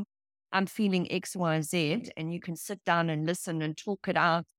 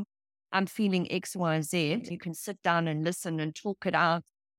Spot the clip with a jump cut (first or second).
second